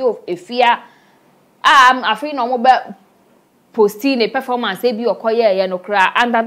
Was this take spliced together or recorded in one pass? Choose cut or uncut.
uncut